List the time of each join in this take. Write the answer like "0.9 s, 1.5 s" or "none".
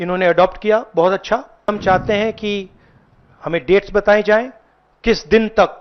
1.7 s